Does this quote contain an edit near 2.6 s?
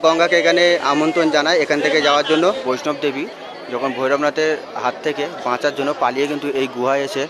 yes; 1 cut; at 2.6 s

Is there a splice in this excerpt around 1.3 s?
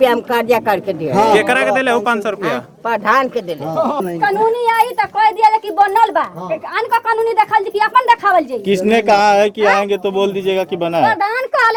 no; 0 cuts

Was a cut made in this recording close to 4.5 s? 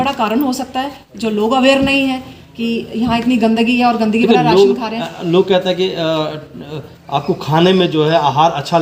no; 0 cuts

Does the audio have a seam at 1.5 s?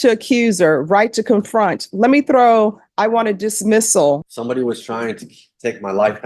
no; 1 cut; at 4.2 s

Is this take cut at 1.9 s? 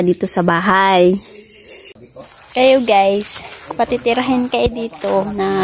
yes; 1 cut; at 1.9 s

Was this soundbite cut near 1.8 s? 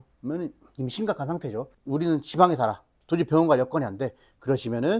yes; 1 cut; at 1.8 s

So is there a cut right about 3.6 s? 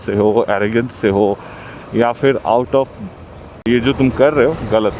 yes; 1 cut; at 3.6 s

